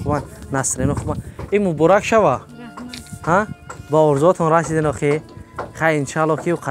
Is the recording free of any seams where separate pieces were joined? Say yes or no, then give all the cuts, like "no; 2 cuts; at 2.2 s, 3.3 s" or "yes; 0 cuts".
yes; 0 cuts